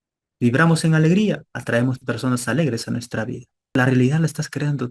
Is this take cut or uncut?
cut